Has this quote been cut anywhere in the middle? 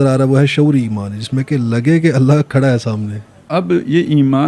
yes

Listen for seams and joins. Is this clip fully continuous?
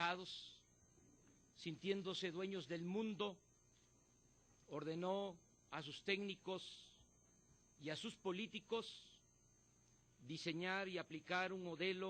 yes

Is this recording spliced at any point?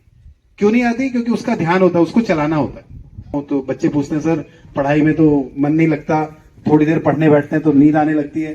yes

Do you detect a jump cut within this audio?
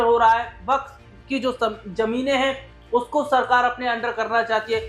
no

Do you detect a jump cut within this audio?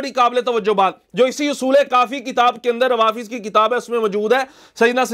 no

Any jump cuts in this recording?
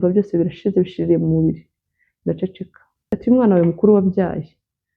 yes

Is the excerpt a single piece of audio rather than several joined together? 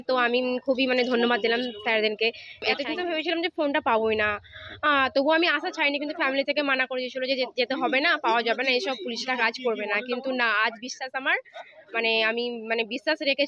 no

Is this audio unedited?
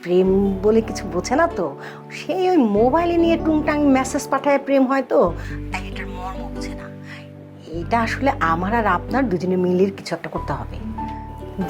yes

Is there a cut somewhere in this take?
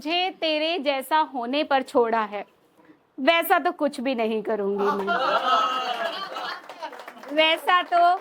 no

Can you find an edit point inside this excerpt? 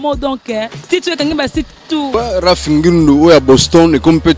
yes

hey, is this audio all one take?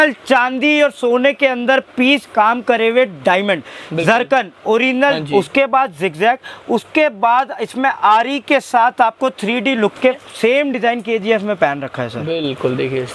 no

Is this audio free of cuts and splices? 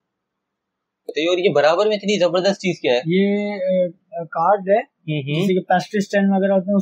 no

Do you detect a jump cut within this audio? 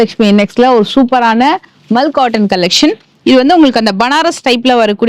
no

